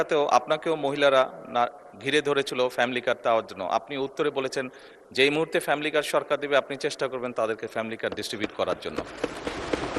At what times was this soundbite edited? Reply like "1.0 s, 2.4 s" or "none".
none